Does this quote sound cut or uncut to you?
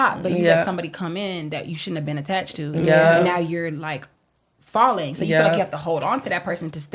uncut